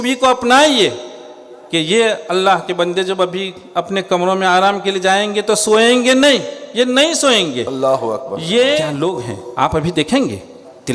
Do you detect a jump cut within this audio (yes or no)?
yes